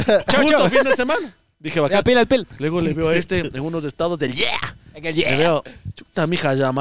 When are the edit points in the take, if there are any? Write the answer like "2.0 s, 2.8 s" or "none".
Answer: none